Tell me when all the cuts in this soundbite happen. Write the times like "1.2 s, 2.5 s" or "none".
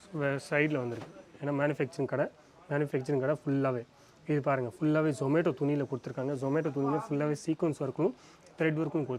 none